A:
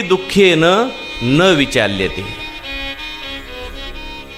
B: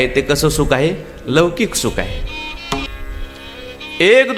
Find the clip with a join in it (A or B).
B